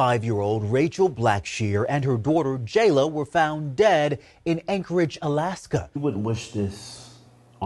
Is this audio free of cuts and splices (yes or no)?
no